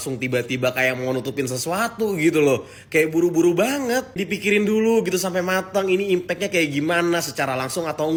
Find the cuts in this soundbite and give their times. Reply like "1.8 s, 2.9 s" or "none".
none